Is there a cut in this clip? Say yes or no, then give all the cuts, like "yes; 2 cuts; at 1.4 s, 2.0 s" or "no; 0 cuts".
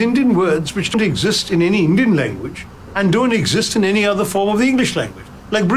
yes; 1 cut; at 0.9 s